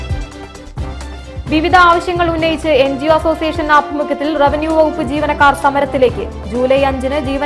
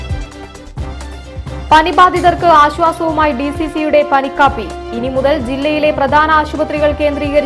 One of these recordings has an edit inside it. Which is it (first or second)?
first